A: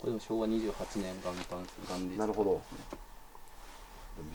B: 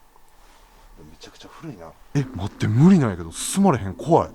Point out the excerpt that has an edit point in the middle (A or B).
B